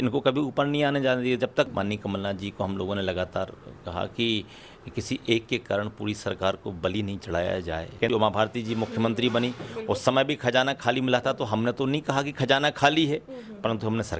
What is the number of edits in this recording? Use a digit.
2